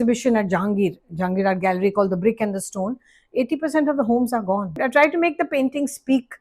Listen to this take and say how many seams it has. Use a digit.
1